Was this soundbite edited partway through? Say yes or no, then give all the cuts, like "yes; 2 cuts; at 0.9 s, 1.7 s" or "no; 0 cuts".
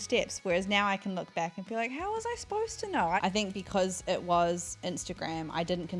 yes; 1 cut; at 3.2 s